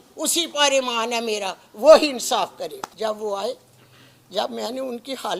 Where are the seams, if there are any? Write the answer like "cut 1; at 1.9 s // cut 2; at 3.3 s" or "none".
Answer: cut 1; at 2.8 s